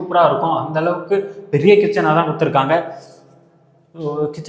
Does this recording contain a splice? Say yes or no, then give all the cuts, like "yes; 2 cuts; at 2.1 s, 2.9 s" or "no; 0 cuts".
no; 0 cuts